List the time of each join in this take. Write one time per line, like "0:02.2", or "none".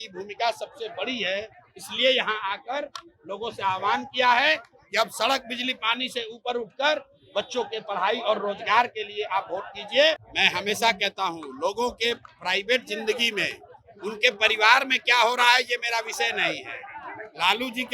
0:10.3